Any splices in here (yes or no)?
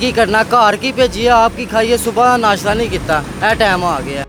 no